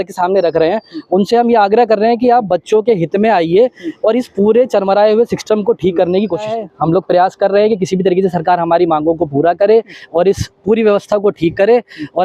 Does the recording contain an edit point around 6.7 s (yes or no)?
yes